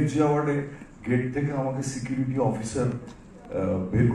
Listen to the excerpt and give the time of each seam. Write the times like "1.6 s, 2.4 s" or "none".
none

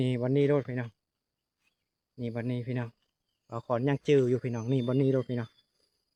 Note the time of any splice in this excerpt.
none

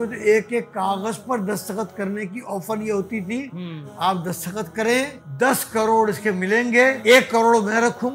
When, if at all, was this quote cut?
5.2 s, 7.0 s

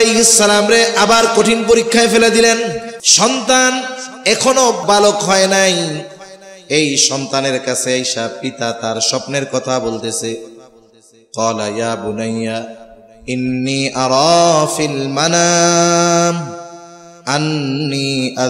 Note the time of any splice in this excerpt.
3.0 s, 4.8 s

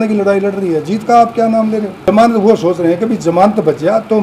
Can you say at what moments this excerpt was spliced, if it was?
2.1 s

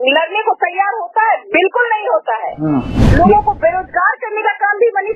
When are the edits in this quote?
3.0 s

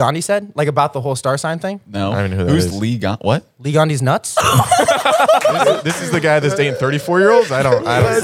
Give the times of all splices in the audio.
5.9 s

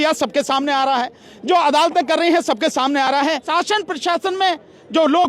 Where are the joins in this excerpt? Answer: 3.4 s

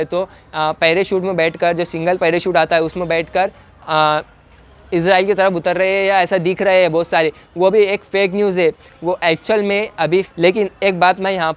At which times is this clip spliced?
10.3 s

